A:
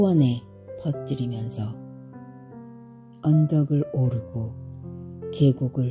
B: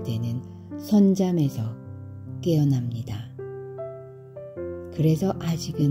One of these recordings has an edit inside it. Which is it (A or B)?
B